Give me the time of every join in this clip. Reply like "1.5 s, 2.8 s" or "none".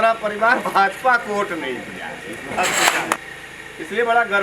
3.2 s